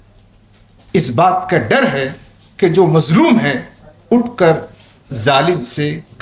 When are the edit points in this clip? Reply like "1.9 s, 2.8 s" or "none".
none